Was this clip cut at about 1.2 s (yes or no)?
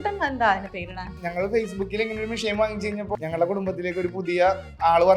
yes